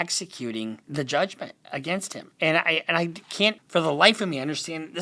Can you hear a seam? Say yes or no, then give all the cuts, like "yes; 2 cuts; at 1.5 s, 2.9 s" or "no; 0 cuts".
yes; 3 cuts; at 0.8 s, 2.2 s, 3.6 s